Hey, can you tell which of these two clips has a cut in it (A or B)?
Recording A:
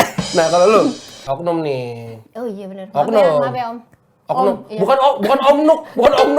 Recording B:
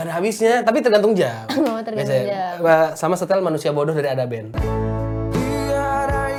A